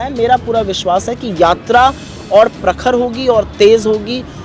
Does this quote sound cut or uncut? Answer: uncut